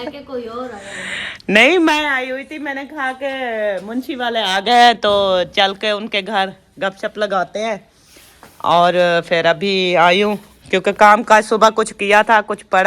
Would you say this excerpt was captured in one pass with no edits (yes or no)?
yes